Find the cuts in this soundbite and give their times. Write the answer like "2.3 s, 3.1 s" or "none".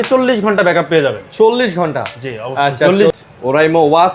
3.1 s